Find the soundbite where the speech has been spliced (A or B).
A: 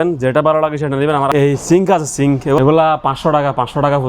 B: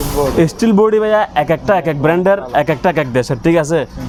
A